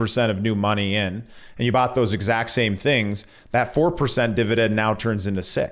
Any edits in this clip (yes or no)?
no